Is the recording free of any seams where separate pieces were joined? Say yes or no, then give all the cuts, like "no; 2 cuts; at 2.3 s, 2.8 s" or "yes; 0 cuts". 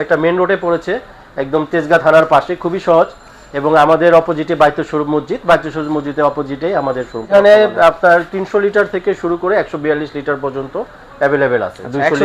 no; 1 cut; at 7.3 s